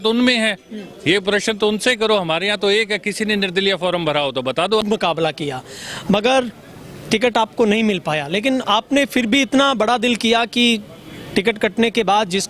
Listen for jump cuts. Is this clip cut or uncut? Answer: cut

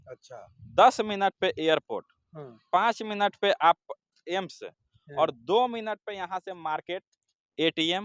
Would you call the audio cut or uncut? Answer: uncut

